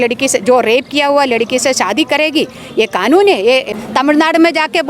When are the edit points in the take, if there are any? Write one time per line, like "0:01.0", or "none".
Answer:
0:03.8